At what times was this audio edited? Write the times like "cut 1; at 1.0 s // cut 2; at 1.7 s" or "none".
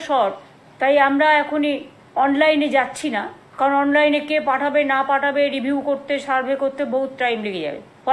none